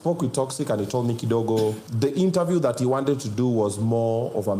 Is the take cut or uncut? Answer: cut